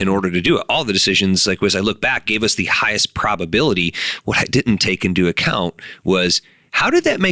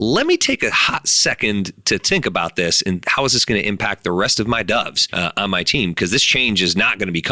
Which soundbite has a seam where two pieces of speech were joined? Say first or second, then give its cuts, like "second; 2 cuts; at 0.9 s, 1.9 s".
second; 1 cut; at 5.0 s